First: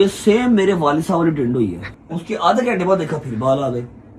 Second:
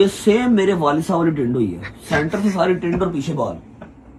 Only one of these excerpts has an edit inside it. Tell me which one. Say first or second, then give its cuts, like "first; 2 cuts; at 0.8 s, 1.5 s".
first; 1 cut; at 1.9 s